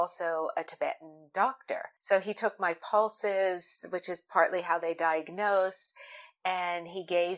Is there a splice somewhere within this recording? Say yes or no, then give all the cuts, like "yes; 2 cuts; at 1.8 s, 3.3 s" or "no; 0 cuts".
yes; 1 cut; at 1.9 s